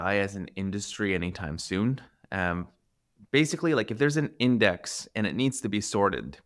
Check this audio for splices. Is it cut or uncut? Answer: uncut